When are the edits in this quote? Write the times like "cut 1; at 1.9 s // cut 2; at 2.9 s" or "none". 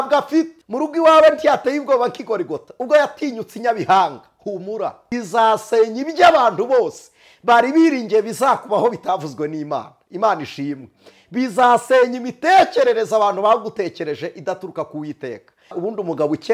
cut 1; at 5.1 s // cut 2; at 15.8 s